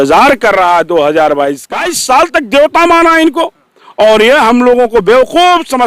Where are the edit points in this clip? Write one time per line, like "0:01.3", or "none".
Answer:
0:01.7